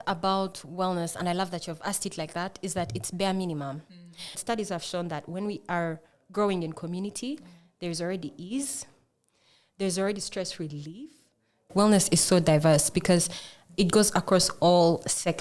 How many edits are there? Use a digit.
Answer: 2